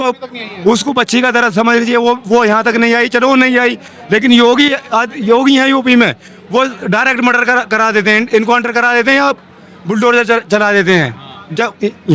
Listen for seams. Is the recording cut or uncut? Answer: uncut